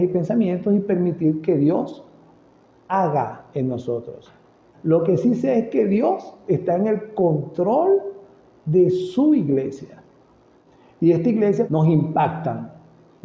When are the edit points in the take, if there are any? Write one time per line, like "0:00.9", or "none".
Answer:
0:11.7